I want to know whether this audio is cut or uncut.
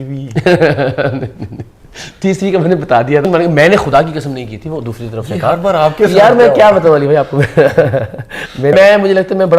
cut